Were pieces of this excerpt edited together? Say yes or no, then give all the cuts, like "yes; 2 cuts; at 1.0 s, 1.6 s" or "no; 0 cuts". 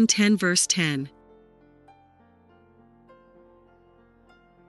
yes; 2 cuts; at 1.1 s, 3.5 s